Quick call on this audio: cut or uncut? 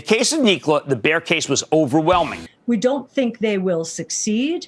cut